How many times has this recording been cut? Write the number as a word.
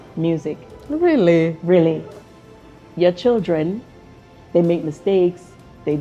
one